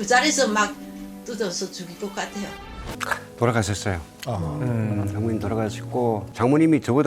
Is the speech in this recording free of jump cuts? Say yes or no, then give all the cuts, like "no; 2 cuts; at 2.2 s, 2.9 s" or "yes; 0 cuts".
no; 2 cuts; at 2.9 s, 6.3 s